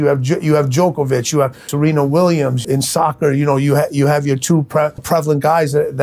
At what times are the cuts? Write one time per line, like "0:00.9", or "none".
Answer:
0:01.7
0:02.6
0:05.0